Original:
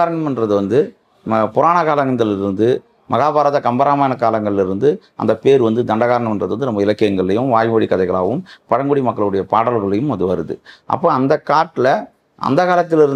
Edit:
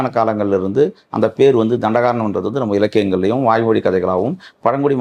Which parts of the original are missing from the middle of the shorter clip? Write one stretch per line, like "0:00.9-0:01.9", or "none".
none

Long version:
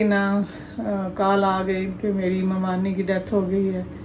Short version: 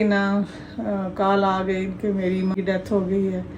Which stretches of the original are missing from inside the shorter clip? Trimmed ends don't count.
0:02.5-0:02.9

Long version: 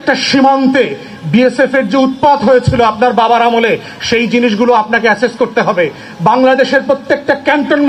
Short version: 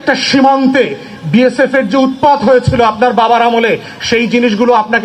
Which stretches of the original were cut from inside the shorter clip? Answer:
none

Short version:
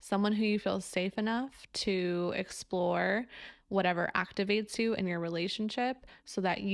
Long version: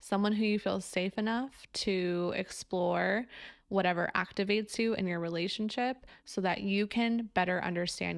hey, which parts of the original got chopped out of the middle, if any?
none

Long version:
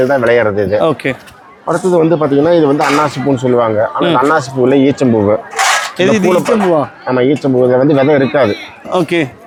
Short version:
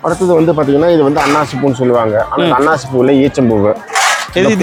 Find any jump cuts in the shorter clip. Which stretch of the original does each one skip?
none

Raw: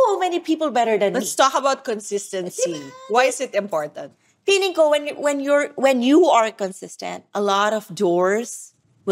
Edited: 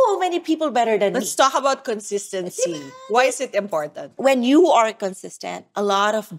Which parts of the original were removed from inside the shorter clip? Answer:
0:04.1-0:05.7

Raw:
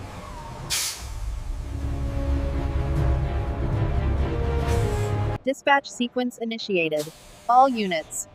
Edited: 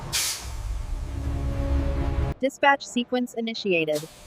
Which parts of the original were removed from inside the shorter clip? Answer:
0:02.9-0:05.4

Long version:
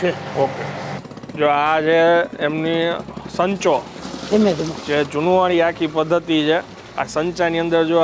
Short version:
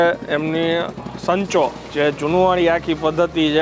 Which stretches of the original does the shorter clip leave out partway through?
0:04.0-0:04.8

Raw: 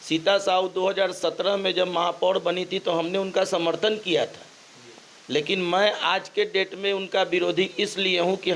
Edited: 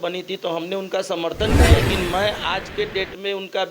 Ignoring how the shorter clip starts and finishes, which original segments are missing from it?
0:04.2-0:05.4

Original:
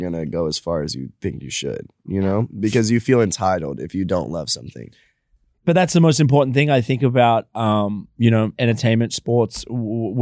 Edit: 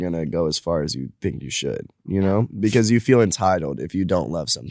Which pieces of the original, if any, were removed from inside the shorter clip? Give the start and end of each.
none

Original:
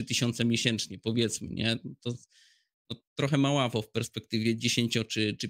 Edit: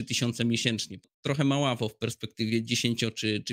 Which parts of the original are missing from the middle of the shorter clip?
0:00.9-0:02.8

